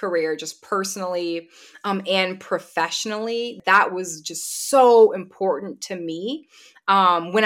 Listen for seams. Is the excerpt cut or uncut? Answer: cut